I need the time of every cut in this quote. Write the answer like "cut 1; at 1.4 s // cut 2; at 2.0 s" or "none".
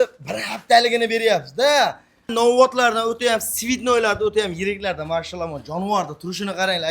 cut 1; at 2.3 s